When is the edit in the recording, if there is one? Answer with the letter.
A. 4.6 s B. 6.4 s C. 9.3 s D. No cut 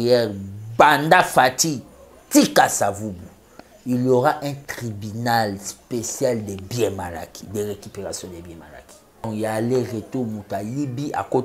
C